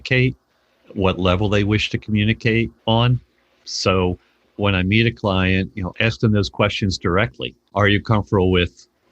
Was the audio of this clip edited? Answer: yes; 2 cuts; at 2.8 s, 7.6 s

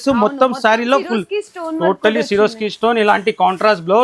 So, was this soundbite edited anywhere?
no; 0 cuts

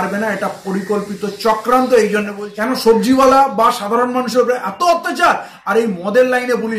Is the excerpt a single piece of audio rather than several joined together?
no; 1 cut; at 2.4 s

